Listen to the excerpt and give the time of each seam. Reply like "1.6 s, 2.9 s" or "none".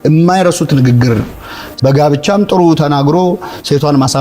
1.4 s